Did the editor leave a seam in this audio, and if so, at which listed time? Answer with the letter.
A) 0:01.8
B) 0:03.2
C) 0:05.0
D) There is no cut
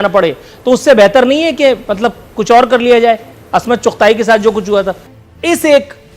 C